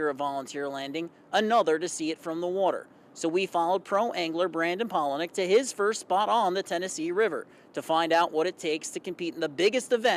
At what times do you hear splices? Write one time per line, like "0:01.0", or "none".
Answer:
none